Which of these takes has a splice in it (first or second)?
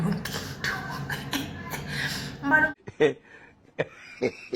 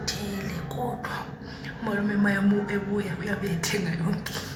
first